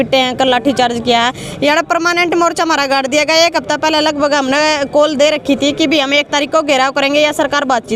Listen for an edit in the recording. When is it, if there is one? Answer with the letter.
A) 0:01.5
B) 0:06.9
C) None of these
C